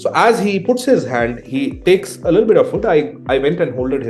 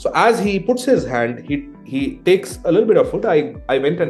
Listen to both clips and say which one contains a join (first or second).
first